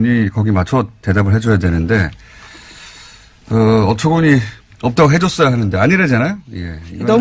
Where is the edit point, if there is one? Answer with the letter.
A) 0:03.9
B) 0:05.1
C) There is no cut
A